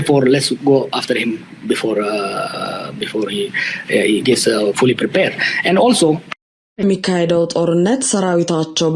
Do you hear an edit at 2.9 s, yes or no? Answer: no